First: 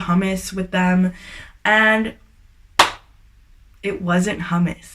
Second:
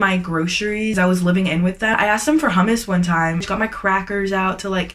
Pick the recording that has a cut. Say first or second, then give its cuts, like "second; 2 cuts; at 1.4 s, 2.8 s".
second; 3 cuts; at 0.9 s, 1.9 s, 3.5 s